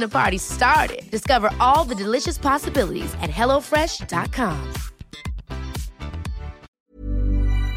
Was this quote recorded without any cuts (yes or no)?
no